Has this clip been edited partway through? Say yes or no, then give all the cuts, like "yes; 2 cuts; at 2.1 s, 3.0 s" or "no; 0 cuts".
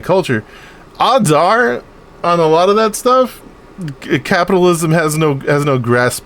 no; 0 cuts